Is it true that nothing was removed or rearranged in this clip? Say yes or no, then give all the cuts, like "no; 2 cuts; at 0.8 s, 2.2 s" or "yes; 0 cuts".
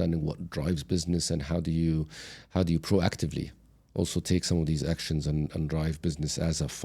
yes; 0 cuts